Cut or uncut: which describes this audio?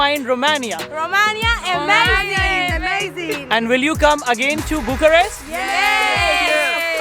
uncut